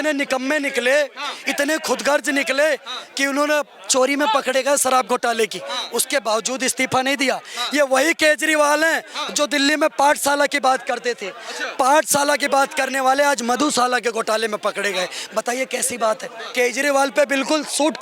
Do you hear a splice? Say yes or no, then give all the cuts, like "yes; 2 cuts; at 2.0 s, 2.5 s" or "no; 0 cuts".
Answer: yes; 1 cut; at 16.4 s